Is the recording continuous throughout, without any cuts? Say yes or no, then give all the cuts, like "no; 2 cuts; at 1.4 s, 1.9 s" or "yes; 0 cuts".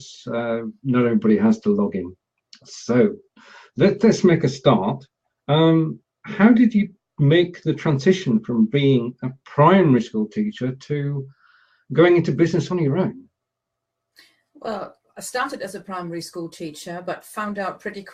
yes; 0 cuts